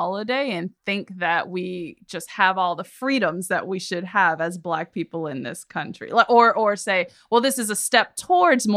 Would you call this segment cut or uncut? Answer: uncut